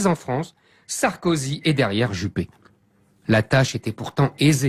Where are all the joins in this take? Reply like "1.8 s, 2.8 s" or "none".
none